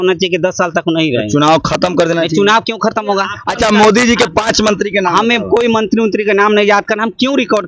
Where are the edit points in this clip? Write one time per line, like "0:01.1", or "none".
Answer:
0:03.4